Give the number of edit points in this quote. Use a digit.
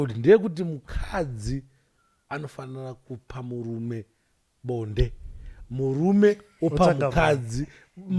0